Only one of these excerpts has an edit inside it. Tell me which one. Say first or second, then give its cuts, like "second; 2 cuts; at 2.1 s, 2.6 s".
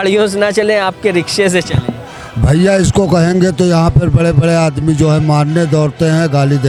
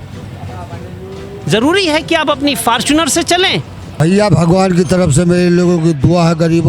second; 1 cut; at 3.9 s